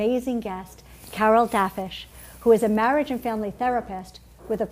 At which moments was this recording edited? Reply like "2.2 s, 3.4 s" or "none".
3.7 s